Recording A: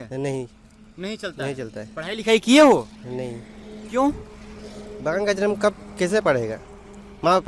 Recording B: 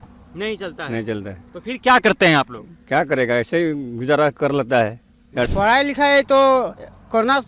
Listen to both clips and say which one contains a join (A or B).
B